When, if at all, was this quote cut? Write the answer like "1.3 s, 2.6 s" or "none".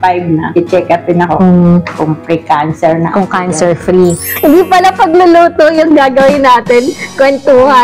4.3 s